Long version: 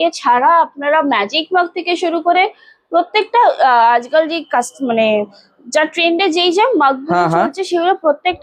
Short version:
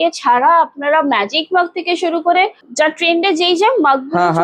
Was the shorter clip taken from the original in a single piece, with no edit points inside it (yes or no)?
no